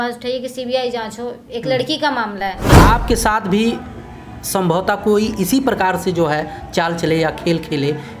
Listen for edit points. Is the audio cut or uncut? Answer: cut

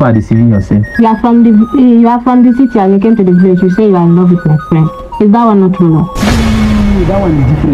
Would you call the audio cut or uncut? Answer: uncut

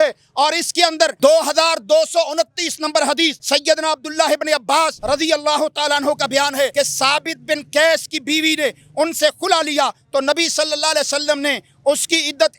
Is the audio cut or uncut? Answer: cut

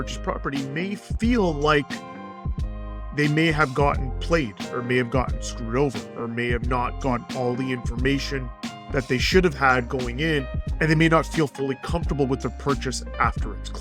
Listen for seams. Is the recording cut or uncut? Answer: uncut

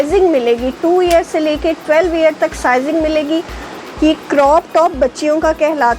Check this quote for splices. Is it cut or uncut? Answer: cut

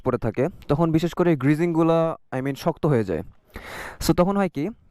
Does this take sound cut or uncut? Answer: uncut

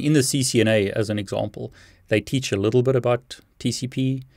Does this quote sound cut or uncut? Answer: uncut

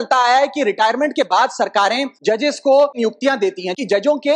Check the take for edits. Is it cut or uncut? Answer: cut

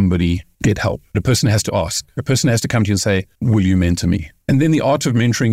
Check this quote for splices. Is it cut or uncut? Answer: cut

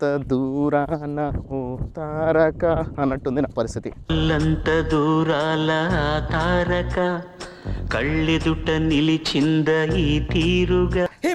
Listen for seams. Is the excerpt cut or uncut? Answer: uncut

